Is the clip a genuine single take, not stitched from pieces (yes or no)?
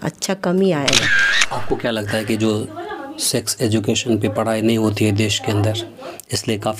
no